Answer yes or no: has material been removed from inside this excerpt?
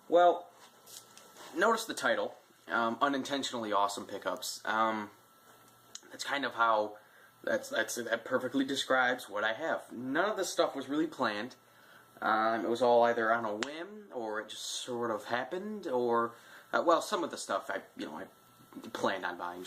yes